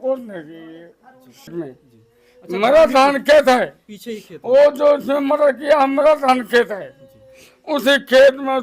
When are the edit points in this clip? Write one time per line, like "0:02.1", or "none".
0:01.6